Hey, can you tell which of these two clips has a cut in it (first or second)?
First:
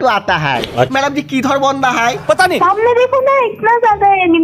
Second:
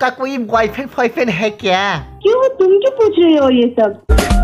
first